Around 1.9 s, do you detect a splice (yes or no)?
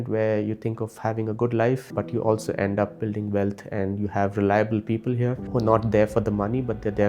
yes